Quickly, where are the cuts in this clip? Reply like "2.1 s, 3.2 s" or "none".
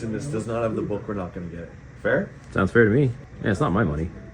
3.2 s